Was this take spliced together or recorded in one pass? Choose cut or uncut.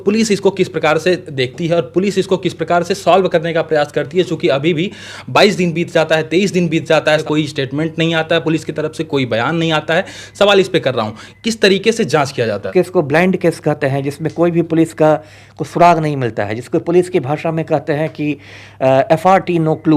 cut